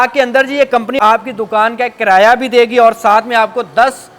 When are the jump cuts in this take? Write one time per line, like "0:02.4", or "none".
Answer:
0:01.0